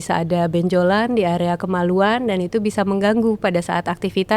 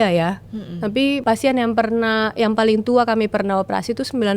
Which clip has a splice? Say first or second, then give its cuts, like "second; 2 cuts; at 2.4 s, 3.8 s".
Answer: second; 1 cut; at 1.2 s